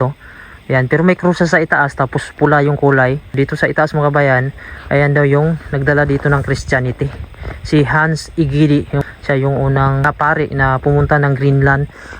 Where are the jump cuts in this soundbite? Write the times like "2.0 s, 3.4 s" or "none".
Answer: 3.3 s, 9.0 s, 10.0 s